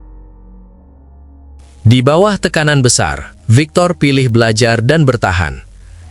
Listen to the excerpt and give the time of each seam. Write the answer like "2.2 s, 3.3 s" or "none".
1.8 s